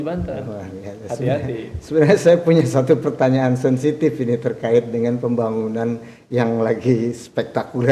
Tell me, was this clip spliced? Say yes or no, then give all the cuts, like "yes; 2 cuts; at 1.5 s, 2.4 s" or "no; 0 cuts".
no; 0 cuts